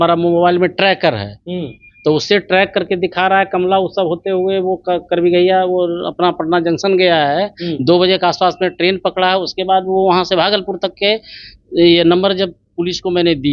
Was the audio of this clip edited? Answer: no; 0 cuts

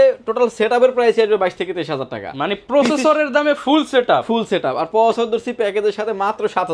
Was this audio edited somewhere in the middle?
no; 0 cuts

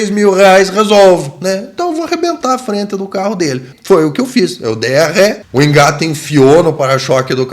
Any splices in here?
yes; 2 cuts; at 3.7 s, 5.4 s

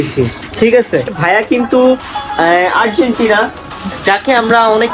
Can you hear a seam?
yes; 1 cut; at 1.2 s

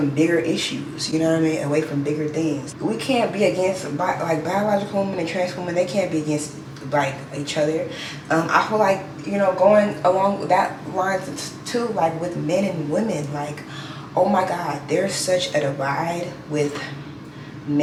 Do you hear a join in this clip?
no; 0 cuts

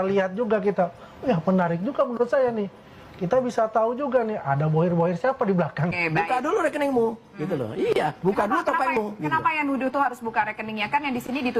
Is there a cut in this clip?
yes; 1 cut; at 6.0 s

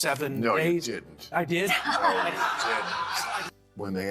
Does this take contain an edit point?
yes; 1 cut; at 3.2 s

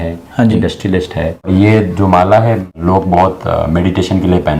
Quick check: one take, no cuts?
no; 2 cuts; at 1.5 s, 2.8 s

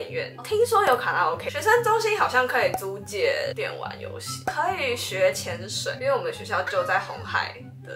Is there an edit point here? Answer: no; 0 cuts

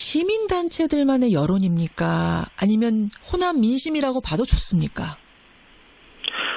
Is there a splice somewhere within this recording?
no; 0 cuts

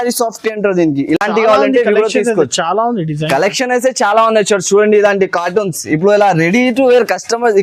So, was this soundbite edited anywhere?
no; 0 cuts

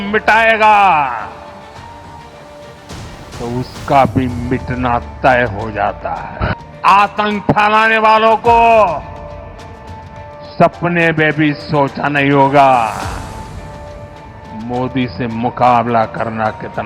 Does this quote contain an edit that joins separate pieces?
yes; 3 cuts; at 6.5 s, 9.1 s, 10.6 s

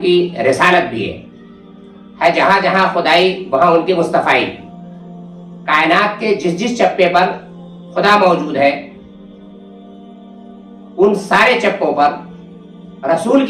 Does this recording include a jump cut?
no; 0 cuts

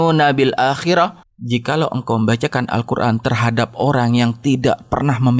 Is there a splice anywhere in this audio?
yes; 1 cut; at 1.3 s

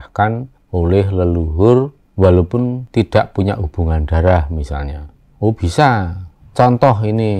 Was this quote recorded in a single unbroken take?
yes; 0 cuts

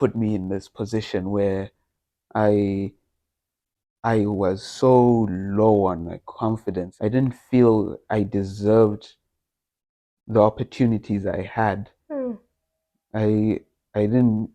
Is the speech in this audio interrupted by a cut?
no; 0 cuts

